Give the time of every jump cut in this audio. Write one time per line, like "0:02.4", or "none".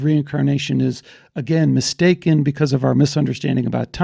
none